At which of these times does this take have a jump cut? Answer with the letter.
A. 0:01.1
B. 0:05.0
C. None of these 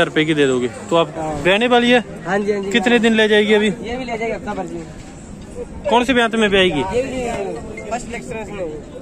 A